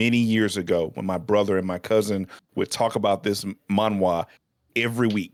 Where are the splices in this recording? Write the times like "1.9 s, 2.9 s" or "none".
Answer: none